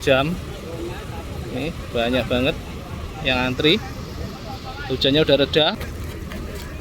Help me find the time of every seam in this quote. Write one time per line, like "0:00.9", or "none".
0:05.9